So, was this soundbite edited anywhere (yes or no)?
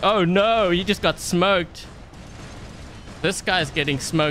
no